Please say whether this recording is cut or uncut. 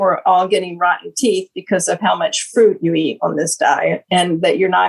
uncut